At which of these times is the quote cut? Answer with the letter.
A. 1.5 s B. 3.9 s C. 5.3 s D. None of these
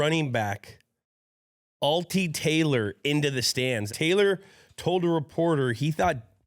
B